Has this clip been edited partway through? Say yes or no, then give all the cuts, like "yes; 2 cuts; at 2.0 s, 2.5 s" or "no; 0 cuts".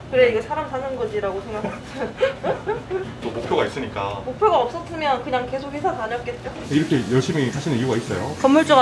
yes; 1 cut; at 6.6 s